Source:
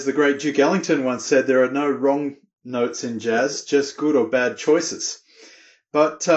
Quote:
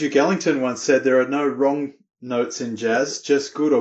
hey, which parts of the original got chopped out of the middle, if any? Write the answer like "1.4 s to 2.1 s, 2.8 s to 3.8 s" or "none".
none